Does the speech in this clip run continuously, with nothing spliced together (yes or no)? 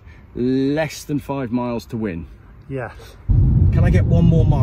no